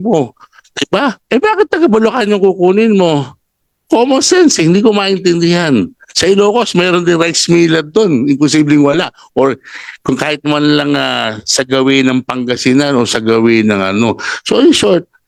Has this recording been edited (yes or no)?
no